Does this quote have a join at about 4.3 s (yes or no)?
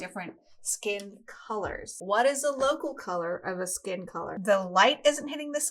yes